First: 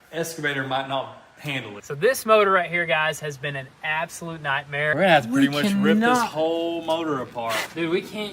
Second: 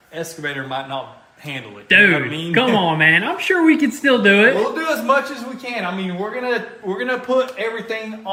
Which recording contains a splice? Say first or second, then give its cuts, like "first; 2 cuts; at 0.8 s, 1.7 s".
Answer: first; 2 cuts; at 1.8 s, 4.9 s